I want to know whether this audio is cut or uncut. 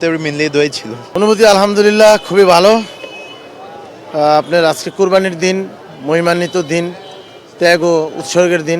cut